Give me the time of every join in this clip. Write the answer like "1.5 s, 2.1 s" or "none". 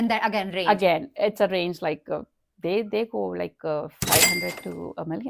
none